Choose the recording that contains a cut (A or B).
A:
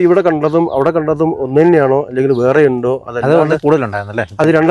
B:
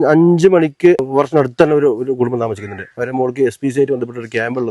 B